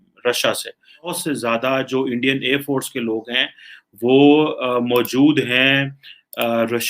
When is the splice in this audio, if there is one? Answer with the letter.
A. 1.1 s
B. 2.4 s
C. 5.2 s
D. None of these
A